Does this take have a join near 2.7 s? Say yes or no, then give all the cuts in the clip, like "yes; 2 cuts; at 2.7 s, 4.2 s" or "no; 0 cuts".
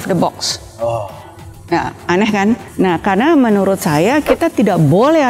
yes; 1 cut; at 2.7 s